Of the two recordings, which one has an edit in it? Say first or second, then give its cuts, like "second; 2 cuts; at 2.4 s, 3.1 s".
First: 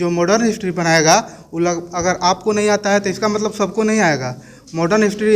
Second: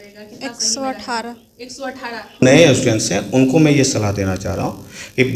second; 1 cut; at 2.4 s